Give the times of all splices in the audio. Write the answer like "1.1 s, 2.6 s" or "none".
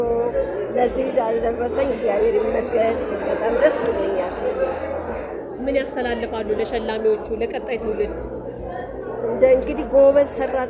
none